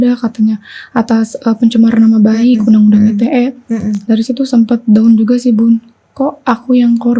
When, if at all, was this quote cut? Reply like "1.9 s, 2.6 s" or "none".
none